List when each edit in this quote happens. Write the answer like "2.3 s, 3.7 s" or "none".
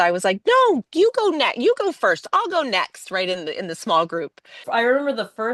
4.3 s

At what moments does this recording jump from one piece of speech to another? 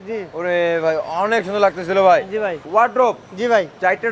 2.6 s

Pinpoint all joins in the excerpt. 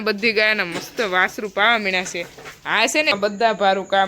3.1 s

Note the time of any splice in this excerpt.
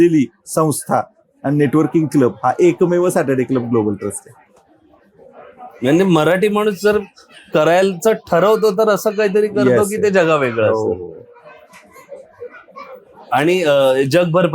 none

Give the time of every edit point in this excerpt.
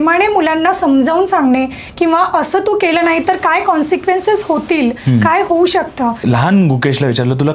6.2 s

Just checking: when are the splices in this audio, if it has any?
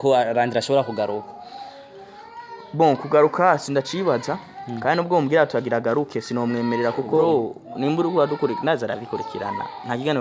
7.2 s

